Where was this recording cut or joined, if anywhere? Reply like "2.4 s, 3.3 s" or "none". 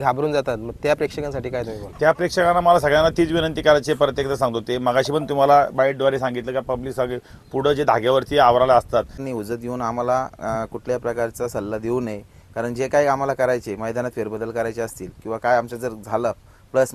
9.2 s